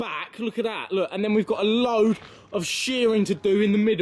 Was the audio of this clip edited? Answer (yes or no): no